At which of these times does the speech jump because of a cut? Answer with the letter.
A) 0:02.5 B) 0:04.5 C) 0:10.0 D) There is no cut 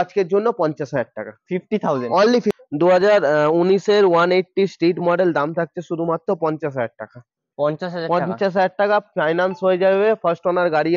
A